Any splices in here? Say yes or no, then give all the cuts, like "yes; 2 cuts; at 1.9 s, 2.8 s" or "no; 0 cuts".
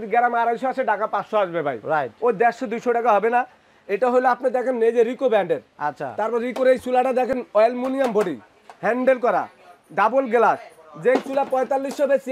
no; 0 cuts